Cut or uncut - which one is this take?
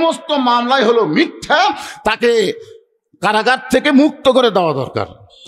uncut